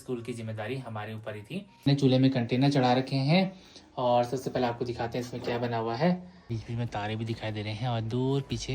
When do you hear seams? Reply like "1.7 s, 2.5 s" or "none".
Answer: 1.9 s, 6.5 s